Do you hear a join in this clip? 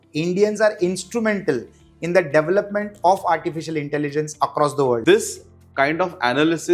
yes; 1 cut; at 5.0 s

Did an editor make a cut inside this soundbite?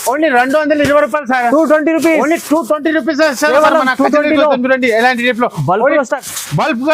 no; 0 cuts

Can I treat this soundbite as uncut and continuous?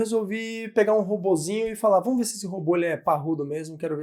yes; 0 cuts

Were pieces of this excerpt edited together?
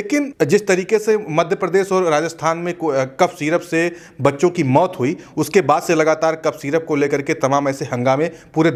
no; 0 cuts

